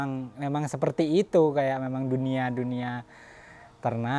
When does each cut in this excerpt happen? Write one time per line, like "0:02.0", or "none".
none